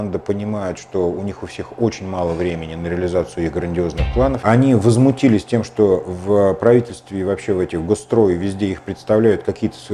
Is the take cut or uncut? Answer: cut